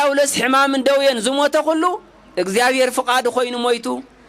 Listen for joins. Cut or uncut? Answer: uncut